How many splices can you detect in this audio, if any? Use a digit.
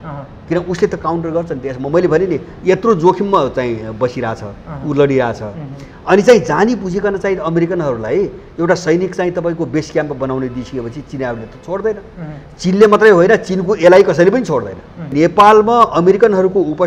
1